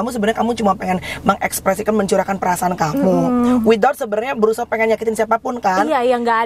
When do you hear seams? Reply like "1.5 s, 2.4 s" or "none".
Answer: none